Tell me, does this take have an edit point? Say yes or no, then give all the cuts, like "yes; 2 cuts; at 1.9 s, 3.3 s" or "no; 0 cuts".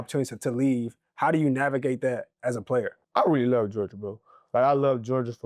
yes; 1 cut; at 3.0 s